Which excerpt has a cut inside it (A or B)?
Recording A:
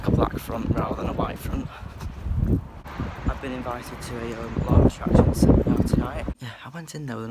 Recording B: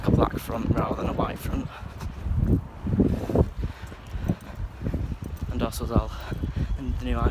A